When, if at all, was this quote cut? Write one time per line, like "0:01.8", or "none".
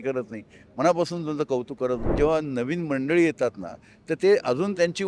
0:02.1

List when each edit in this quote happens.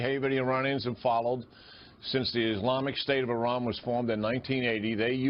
none

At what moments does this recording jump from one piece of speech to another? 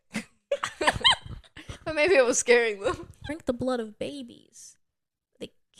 0:03.3

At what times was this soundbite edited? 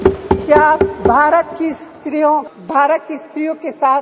0:02.6

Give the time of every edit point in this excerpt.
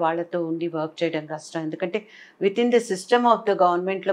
none

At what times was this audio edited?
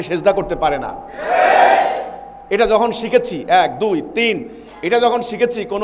none

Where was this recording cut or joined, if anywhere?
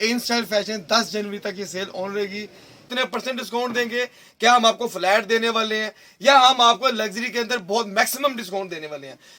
0:02.8

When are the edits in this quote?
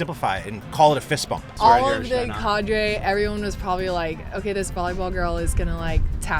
0:01.5

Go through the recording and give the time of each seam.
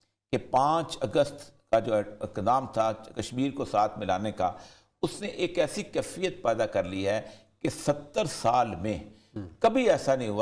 none

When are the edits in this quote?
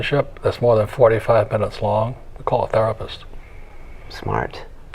none

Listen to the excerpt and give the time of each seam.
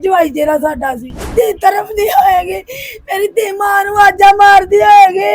0:01.3

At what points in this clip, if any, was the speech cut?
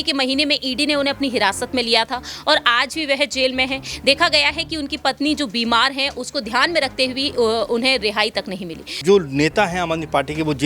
0:09.0

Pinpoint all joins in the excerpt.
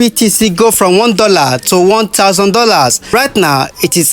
0:03.1

